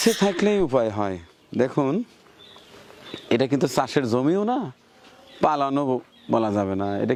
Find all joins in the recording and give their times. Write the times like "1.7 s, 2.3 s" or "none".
none